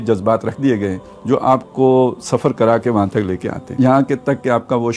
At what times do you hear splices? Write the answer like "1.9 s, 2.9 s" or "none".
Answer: 3.8 s